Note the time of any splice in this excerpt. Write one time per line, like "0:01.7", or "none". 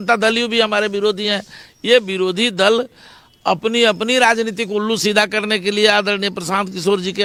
none